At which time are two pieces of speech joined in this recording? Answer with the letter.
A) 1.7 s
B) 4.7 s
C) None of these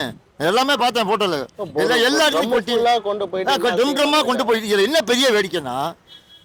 C